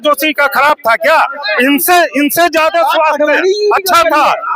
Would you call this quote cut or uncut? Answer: uncut